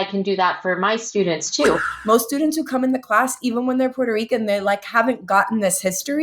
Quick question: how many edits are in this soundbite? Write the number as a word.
one